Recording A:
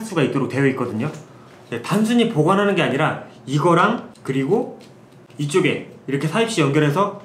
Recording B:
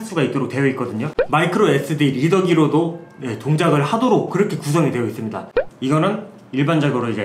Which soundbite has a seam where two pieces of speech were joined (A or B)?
B